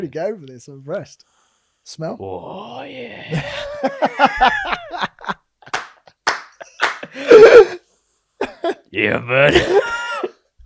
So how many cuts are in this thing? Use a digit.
0